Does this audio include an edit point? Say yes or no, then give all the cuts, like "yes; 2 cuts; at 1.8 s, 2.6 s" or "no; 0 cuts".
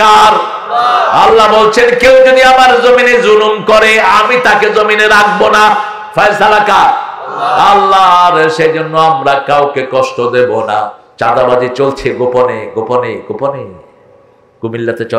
yes; 1 cut; at 11.0 s